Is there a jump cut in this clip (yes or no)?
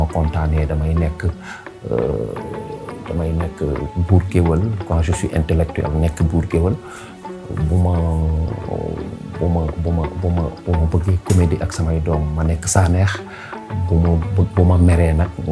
no